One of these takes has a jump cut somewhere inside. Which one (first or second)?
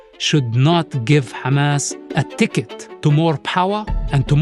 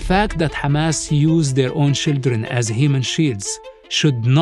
first